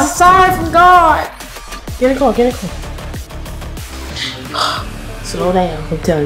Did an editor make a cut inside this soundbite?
yes; 1 cut; at 4.2 s

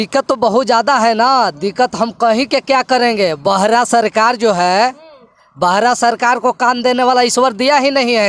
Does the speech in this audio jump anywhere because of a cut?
no; 0 cuts

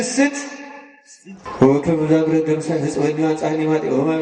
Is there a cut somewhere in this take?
yes; 1 cut; at 1.3 s

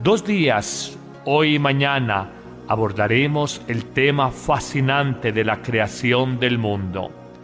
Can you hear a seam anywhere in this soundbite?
no; 0 cuts

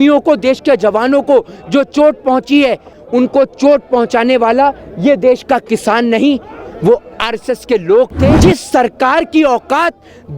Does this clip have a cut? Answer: yes; 2 cuts; at 3.0 s, 8.3 s

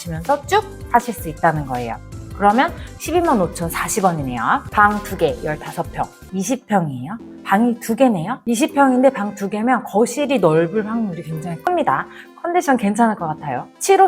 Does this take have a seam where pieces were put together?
yes; 2 cuts; at 4.7 s, 6.2 s

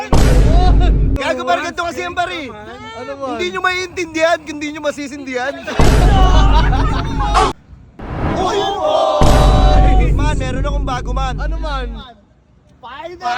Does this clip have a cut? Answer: yes; 2 cuts; at 1.2 s, 7.6 s

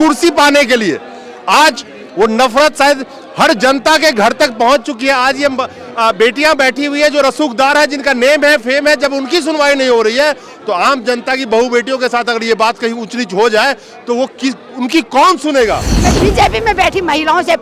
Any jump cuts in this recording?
yes; 1 cut; at 16.1 s

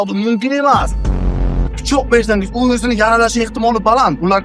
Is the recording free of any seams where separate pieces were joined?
no; 1 cut; at 1.4 s

